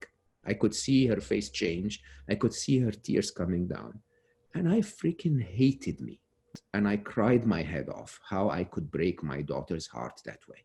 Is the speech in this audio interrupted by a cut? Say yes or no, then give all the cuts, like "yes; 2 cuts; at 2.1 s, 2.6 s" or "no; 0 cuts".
yes; 1 cut; at 6.4 s